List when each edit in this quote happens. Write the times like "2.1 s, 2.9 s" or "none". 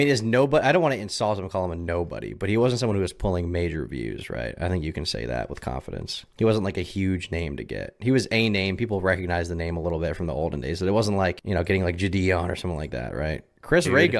13.2 s